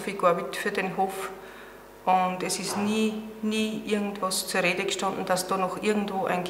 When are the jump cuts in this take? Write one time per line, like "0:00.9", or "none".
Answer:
none